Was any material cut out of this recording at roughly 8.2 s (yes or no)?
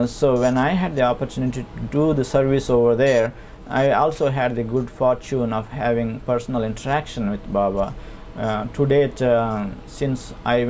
no